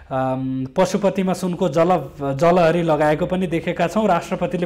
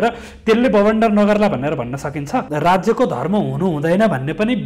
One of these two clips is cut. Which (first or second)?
second